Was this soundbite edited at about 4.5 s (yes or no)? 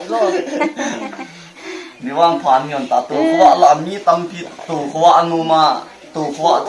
no